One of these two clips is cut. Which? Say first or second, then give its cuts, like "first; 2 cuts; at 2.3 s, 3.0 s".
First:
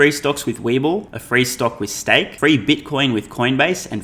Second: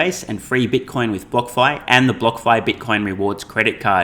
first; 2 cuts; at 1.2 s, 2.3 s